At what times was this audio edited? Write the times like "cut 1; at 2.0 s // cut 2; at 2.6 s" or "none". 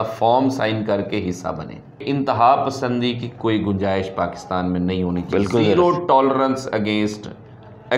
cut 1; at 2.0 s